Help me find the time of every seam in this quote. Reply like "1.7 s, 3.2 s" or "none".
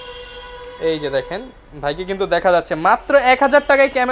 none